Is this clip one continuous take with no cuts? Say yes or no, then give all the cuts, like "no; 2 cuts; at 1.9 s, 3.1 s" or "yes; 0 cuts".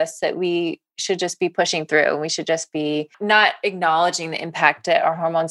no; 1 cut; at 3.1 s